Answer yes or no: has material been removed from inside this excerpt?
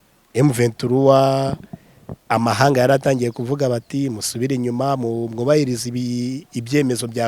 no